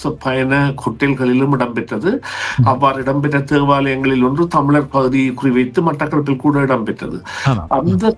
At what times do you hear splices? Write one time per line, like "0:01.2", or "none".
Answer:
none